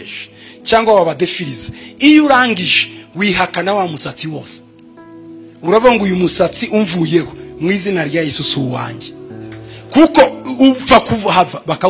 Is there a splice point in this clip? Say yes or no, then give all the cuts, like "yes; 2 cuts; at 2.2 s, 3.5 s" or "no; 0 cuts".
no; 0 cuts